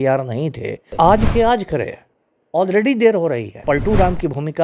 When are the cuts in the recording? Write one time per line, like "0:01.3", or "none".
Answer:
0:00.8
0:03.6